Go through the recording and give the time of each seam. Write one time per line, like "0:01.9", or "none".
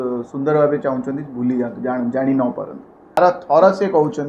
0:03.2